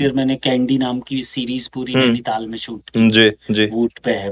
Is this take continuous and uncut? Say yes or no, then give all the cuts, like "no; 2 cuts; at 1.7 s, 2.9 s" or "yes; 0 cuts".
yes; 0 cuts